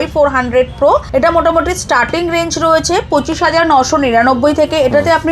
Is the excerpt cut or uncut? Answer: cut